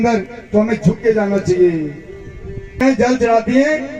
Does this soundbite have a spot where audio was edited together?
yes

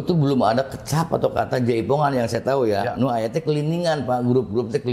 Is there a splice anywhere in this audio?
no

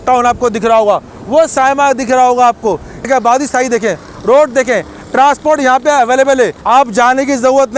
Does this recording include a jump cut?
yes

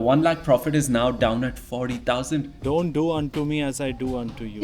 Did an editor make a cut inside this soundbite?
yes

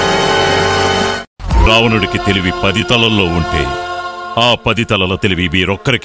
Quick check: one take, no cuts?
yes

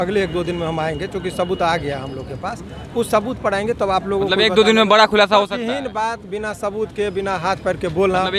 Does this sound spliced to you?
no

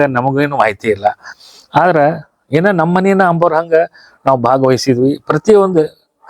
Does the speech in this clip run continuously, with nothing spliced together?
yes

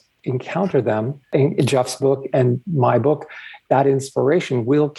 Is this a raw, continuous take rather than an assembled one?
yes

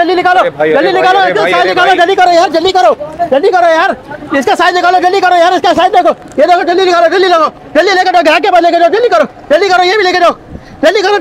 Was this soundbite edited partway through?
no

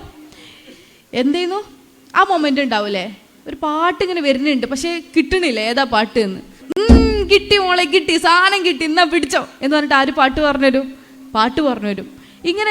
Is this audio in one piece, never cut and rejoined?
no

